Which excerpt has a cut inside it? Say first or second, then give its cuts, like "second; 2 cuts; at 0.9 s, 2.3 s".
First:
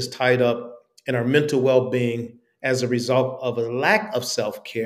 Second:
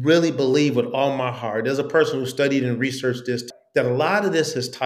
second; 1 cut; at 3.5 s